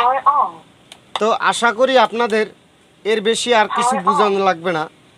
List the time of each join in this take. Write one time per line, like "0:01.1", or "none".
none